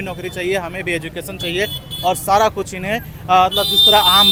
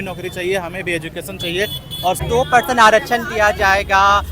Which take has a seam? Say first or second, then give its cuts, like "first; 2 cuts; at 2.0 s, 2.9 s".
second; 1 cut; at 2.2 s